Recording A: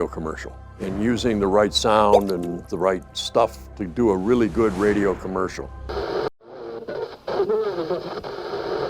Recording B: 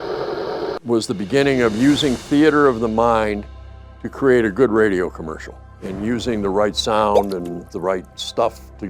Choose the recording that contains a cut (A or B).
A